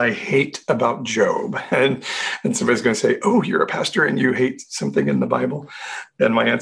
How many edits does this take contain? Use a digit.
1